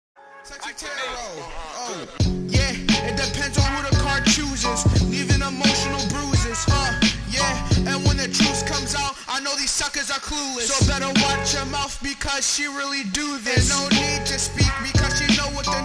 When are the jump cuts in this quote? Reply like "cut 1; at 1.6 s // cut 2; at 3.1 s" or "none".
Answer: none